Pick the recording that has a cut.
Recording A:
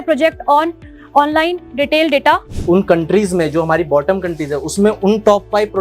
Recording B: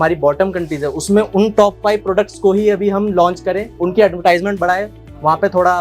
A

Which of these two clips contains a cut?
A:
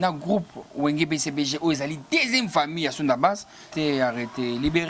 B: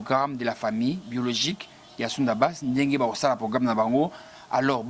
A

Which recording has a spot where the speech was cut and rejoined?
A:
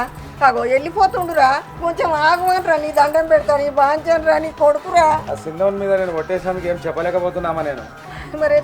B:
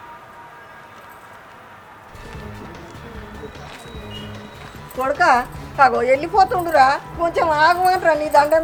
A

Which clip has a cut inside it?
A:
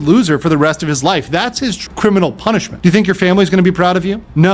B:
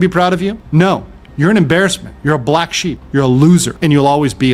A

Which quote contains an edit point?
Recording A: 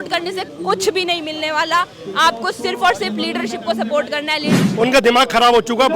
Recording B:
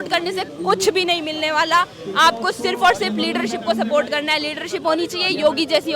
A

